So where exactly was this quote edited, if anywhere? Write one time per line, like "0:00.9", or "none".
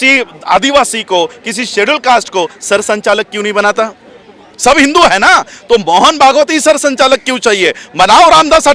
none